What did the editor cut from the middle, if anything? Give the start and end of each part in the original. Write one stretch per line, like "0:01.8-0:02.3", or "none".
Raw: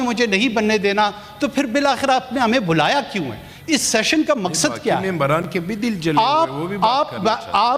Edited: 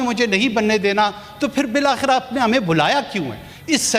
none

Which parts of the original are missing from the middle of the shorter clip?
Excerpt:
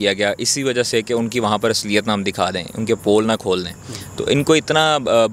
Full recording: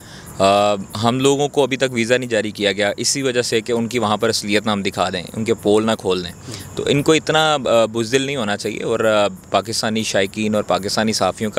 none

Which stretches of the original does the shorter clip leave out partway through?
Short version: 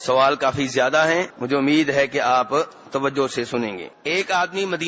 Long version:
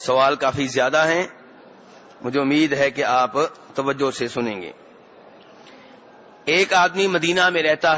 0:01.3-0:02.2
0:04.7-0:06.3

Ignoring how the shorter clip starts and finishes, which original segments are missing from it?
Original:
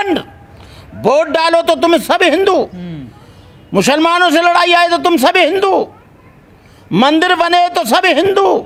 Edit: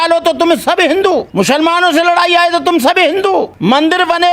0:02.7-0:03.7
0:05.9-0:06.8

